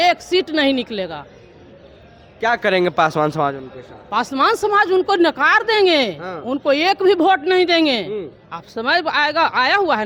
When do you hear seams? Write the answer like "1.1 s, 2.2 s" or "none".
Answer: none